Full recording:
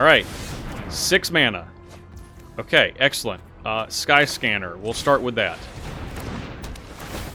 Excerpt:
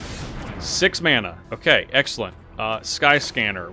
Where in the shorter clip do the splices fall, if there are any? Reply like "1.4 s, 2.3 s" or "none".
1.4 s